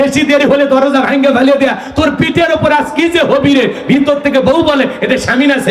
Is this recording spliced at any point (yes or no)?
no